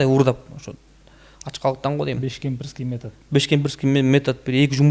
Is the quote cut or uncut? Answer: uncut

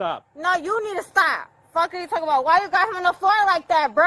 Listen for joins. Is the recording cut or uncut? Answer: uncut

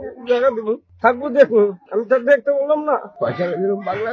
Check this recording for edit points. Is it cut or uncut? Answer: cut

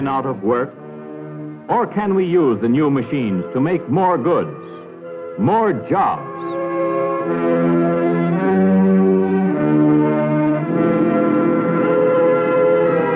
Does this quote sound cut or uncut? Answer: uncut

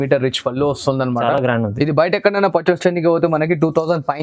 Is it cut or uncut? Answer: uncut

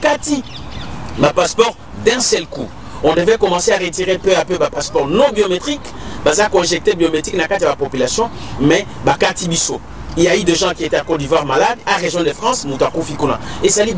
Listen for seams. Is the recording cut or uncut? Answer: uncut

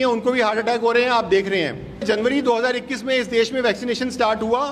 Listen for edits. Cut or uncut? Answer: cut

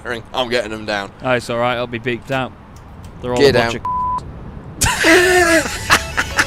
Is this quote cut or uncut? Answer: uncut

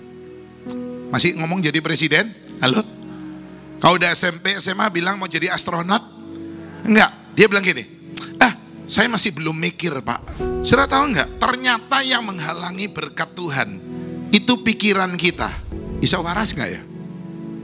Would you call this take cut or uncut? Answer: cut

